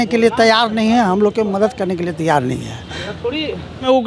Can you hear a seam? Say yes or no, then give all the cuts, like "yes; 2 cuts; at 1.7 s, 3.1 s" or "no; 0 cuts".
no; 0 cuts